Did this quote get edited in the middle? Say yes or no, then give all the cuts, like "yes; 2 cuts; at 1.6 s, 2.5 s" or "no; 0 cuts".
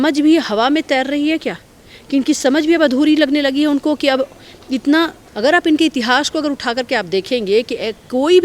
yes; 1 cut; at 5.2 s